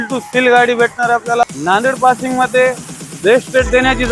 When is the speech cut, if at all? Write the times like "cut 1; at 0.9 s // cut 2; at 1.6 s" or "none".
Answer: cut 1; at 1.4 s